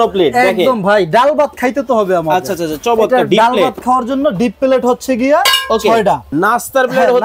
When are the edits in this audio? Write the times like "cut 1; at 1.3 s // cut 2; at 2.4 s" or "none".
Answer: cut 1; at 6.3 s